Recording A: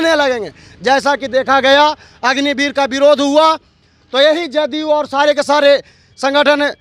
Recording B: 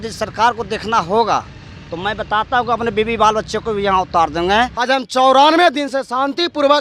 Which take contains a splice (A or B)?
B